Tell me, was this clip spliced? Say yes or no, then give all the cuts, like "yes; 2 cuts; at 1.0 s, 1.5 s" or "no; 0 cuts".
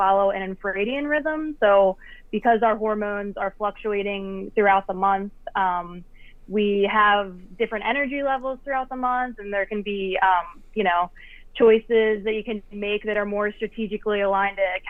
no; 0 cuts